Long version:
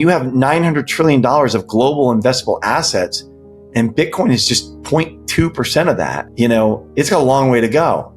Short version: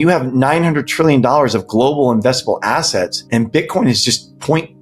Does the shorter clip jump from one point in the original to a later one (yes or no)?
yes